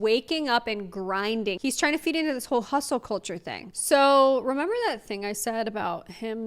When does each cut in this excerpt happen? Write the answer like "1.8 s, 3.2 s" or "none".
1.6 s, 3.6 s